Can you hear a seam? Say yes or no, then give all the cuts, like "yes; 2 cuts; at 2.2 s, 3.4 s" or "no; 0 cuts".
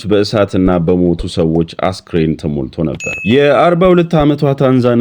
yes; 1 cut; at 3.2 s